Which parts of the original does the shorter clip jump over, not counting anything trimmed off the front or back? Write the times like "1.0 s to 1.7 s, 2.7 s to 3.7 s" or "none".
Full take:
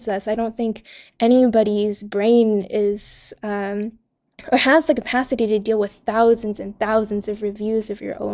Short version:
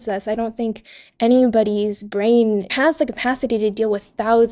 2.7 s to 4.6 s

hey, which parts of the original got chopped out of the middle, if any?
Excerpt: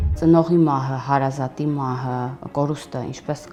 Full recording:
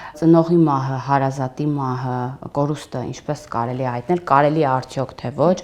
none

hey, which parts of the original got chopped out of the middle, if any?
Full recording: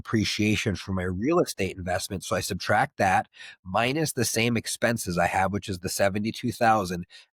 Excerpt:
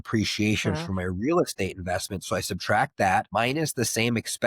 3.3 s to 3.7 s

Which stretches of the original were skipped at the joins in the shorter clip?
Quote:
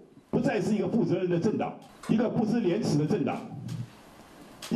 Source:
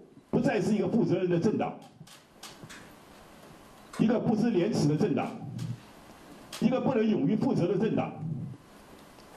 1.9 s to 3.8 s

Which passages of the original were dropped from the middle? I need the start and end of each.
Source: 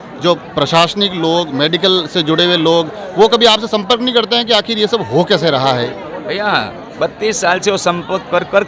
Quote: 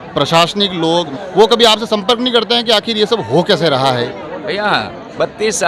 1.5 s to 2.9 s

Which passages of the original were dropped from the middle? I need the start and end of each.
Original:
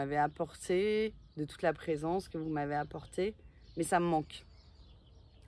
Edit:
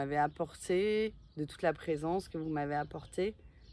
none

